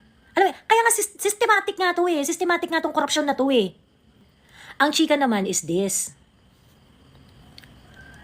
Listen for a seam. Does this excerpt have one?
yes; 1 cut; at 4.2 s

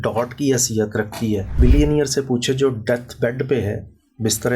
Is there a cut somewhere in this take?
yes; 1 cut; at 1.5 s

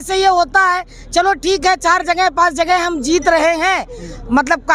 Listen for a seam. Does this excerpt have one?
no; 0 cuts

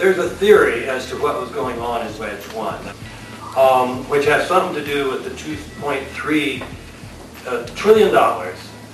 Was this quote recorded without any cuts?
no; 1 cut; at 2.9 s

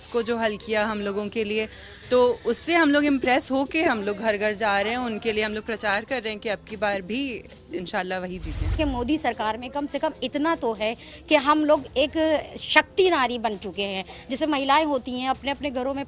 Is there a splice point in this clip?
yes; 1 cut; at 8.8 s

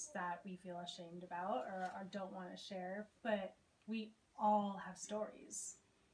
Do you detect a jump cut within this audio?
no; 0 cuts

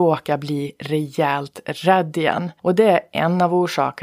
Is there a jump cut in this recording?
yes; 1 cut; at 2.5 s

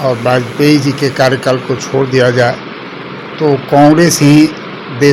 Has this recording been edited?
no; 0 cuts

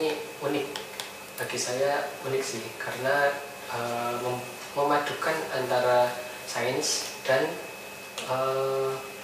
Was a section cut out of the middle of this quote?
no; 0 cuts

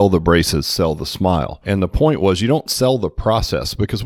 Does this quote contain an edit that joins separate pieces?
no; 0 cuts

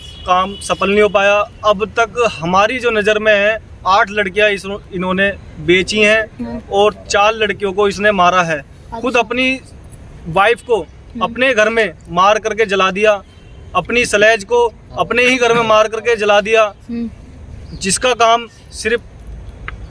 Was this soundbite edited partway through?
no; 0 cuts

